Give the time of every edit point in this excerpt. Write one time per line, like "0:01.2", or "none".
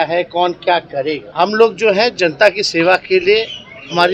0:01.3